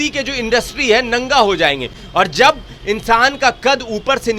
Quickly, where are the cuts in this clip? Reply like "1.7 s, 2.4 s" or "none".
none